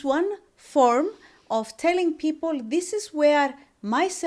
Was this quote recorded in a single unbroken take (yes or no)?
yes